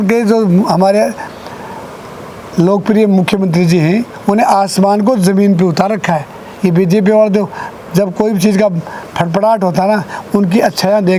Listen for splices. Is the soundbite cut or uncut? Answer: uncut